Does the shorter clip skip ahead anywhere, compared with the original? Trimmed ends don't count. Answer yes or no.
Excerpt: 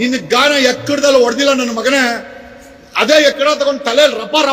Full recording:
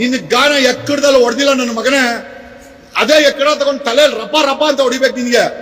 no